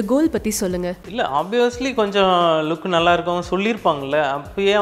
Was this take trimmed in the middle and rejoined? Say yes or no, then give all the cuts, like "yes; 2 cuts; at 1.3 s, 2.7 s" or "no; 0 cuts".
no; 0 cuts